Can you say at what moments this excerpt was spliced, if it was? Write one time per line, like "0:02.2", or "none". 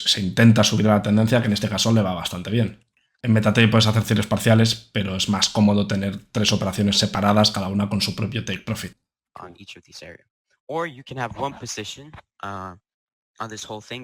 0:03.2